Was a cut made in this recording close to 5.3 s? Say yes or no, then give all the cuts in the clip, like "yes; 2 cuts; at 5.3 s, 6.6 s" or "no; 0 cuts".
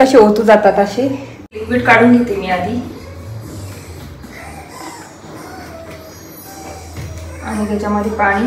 no; 1 cut; at 1.5 s